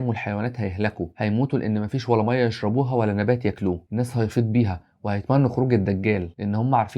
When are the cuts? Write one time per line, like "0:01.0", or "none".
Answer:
0:03.8